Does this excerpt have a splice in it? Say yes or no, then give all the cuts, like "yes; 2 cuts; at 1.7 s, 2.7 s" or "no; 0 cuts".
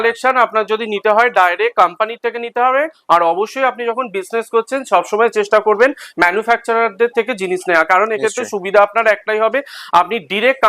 no; 0 cuts